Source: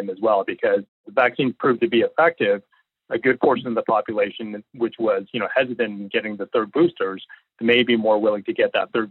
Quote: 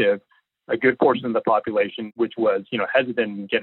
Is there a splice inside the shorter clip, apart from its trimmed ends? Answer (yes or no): yes